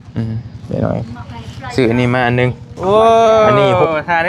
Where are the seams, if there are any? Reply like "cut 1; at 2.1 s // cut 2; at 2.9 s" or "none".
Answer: cut 1; at 2.7 s